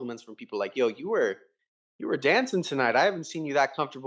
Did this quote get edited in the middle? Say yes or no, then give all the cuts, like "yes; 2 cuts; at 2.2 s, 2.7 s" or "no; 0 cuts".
no; 0 cuts